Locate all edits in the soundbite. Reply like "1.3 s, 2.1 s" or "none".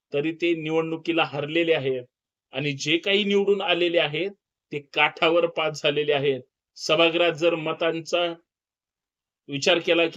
none